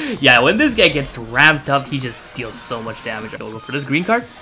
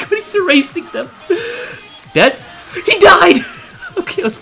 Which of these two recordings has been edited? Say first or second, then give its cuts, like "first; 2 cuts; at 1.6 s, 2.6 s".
first; 1 cut; at 3.4 s